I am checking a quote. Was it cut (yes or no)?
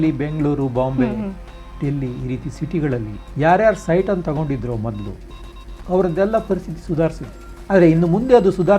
yes